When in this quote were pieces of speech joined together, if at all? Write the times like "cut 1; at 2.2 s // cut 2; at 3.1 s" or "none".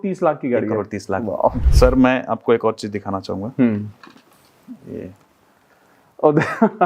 cut 1; at 1.6 s